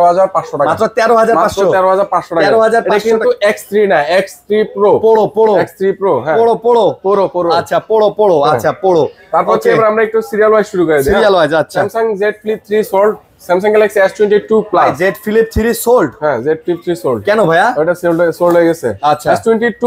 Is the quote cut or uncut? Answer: uncut